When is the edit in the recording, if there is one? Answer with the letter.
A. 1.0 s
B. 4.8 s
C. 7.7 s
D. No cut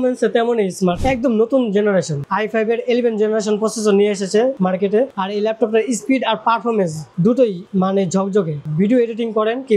A